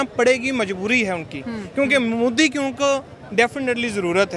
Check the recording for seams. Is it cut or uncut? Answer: uncut